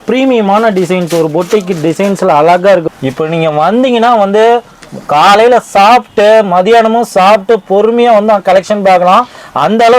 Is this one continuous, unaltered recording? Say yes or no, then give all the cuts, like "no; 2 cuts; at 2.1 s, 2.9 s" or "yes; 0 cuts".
no; 1 cut; at 2.9 s